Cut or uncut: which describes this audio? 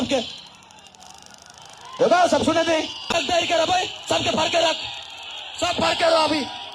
cut